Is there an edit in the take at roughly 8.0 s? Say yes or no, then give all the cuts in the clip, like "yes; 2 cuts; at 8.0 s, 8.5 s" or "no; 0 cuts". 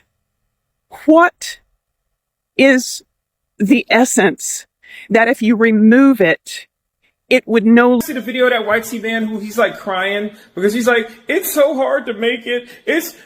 yes; 1 cut; at 8.0 s